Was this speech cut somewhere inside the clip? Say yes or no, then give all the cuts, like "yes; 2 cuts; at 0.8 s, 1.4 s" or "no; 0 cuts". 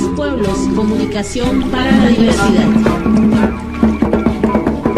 no; 0 cuts